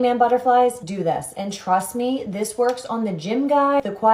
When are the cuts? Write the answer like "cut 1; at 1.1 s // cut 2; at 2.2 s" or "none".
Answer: none